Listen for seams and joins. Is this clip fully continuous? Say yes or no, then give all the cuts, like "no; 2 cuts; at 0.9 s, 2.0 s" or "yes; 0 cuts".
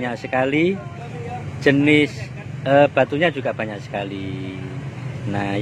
yes; 0 cuts